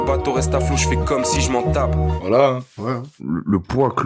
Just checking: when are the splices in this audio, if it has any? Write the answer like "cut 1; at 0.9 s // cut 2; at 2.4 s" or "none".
cut 1; at 2.1 s // cut 2; at 3.0 s